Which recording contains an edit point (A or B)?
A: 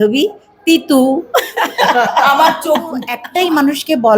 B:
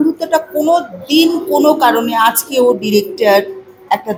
A